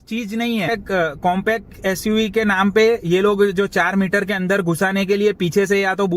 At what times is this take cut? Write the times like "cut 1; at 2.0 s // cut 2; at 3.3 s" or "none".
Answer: cut 1; at 1.2 s